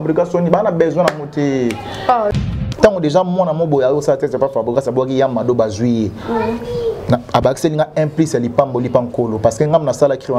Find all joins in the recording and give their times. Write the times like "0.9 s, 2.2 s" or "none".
2.3 s